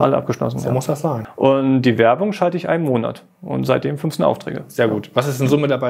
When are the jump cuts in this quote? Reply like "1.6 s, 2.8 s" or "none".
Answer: 1.2 s